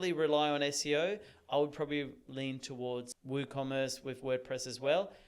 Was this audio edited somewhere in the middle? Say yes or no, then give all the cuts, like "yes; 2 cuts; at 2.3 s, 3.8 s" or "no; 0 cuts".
yes; 1 cut; at 3.2 s